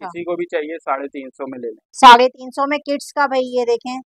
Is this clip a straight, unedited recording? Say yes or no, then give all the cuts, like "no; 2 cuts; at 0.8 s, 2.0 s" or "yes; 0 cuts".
yes; 0 cuts